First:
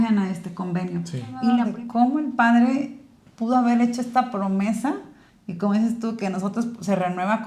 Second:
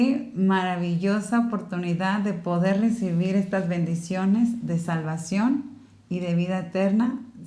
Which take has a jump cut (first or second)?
first